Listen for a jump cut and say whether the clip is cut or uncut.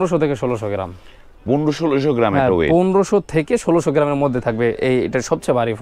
uncut